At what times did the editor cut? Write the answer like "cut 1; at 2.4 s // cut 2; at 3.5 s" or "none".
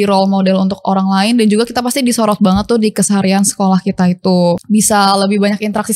cut 1; at 4.6 s